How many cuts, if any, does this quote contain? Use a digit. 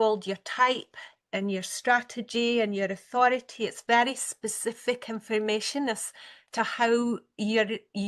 0